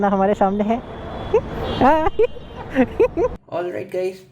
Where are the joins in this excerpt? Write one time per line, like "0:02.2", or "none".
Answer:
0:03.3